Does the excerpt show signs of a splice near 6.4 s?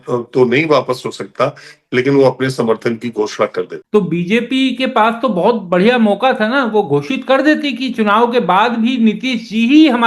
no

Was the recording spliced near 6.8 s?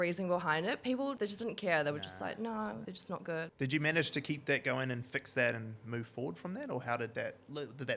no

